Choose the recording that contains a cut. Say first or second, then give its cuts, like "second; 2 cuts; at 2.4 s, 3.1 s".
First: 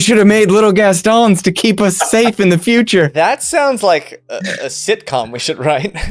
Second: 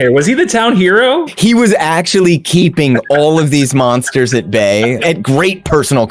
second; 2 cuts; at 1.3 s, 5.0 s